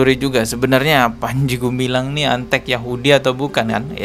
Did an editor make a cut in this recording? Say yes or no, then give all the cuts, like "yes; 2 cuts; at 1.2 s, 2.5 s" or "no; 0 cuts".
no; 0 cuts